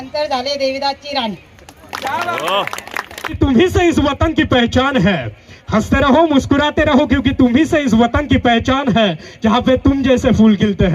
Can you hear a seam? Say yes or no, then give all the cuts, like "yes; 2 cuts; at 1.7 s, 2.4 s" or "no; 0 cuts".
yes; 1 cut; at 3.4 s